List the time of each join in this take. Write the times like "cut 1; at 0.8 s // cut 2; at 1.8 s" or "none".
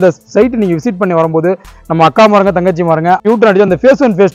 cut 1; at 3.2 s